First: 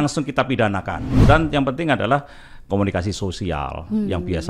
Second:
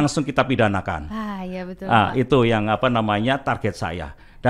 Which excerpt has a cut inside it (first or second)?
first